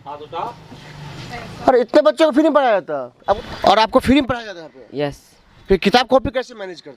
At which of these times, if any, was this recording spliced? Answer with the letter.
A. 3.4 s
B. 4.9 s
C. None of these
A